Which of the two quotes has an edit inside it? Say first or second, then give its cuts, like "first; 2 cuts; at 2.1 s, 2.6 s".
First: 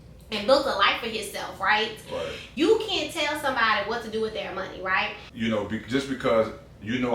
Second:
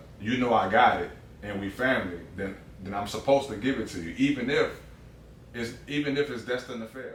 first; 2 cuts; at 2.4 s, 5.2 s